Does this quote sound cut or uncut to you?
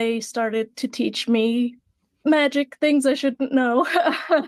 uncut